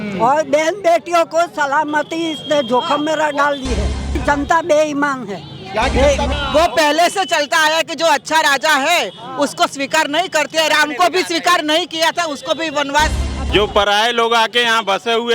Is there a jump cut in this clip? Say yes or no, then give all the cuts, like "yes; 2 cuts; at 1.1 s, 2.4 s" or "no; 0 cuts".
yes; 3 cuts; at 4.1 s, 6.3 s, 13.3 s